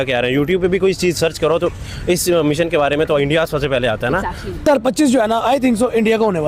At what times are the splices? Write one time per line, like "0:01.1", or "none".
0:04.6